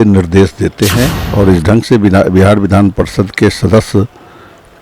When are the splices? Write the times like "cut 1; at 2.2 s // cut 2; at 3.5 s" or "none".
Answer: cut 1; at 1.2 s